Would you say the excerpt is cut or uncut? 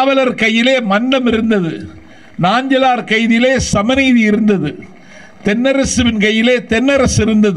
uncut